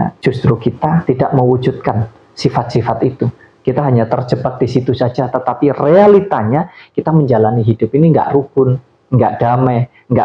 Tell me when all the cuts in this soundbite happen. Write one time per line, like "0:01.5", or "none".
none